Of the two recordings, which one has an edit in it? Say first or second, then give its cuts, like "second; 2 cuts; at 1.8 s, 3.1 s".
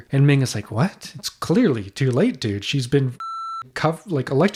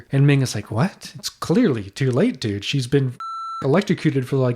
second; 1 cut; at 3.6 s